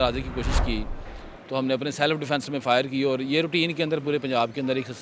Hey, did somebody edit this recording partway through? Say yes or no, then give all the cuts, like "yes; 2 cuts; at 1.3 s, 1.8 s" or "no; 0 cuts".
no; 0 cuts